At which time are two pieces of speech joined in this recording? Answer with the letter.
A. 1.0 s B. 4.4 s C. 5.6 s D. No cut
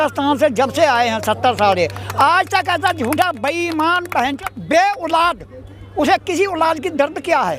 B